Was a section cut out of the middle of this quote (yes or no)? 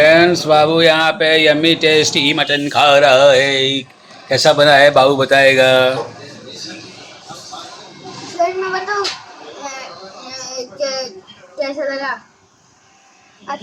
no